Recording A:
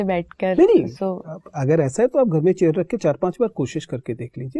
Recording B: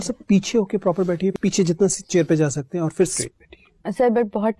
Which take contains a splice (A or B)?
B